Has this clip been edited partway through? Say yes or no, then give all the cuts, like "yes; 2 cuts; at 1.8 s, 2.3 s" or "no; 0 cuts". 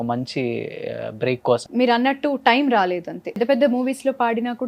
yes; 2 cuts; at 1.7 s, 3.4 s